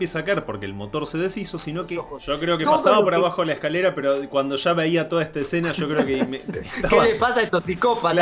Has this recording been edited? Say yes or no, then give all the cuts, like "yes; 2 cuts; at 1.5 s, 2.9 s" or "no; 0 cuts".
yes; 2 cuts; at 2.1 s, 6.7 s